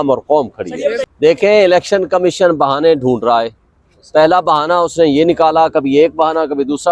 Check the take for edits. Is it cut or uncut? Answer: cut